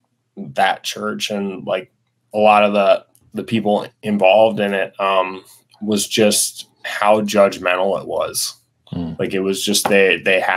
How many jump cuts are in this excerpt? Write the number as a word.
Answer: zero